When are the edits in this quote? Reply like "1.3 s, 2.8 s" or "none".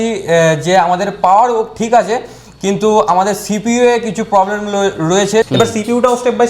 5.5 s